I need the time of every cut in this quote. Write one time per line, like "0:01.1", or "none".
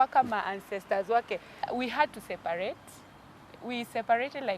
0:01.7